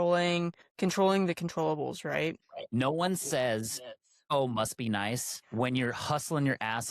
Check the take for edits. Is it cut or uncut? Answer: cut